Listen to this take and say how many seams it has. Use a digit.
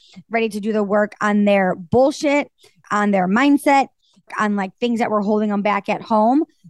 2